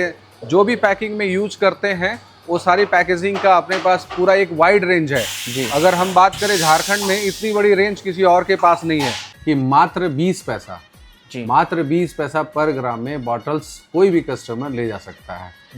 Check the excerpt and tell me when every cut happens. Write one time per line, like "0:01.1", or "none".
0:09.2